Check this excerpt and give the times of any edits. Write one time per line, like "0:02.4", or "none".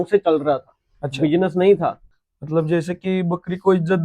0:02.2